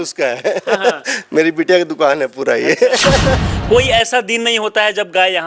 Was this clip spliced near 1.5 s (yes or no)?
no